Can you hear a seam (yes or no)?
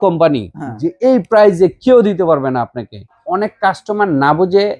yes